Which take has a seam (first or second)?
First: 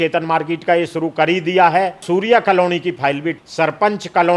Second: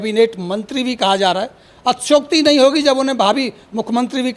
first